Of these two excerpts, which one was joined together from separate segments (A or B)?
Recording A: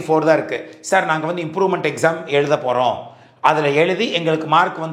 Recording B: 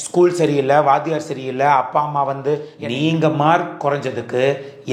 B